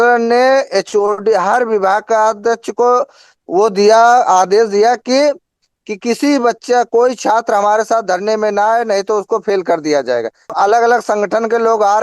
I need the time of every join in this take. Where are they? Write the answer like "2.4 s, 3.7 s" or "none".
10.5 s